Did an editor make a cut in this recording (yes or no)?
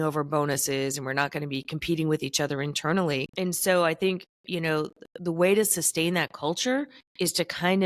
no